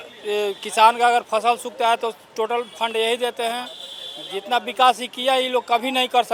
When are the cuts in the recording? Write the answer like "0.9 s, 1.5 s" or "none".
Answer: none